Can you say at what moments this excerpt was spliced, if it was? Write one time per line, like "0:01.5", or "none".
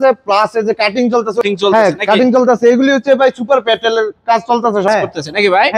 0:01.4
0:04.9